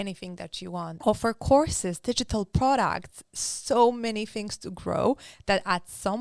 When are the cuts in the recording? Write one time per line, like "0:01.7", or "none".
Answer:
0:01.0